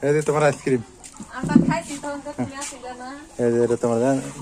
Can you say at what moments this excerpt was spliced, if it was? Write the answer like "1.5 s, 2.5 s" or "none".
none